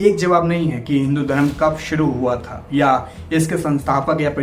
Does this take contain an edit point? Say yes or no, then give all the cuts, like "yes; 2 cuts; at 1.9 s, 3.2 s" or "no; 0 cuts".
no; 0 cuts